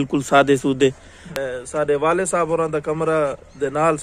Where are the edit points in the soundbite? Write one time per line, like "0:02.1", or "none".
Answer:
0:01.2